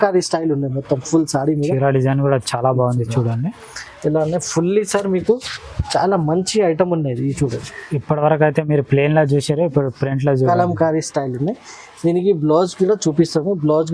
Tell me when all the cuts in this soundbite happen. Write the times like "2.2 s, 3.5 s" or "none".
none